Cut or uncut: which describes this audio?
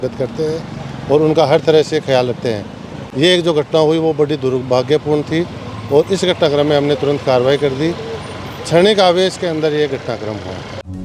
uncut